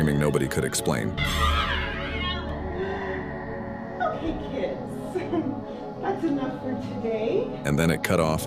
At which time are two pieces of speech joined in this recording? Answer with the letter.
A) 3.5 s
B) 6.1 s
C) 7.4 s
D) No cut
D